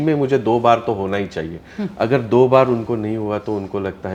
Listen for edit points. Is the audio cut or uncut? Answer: uncut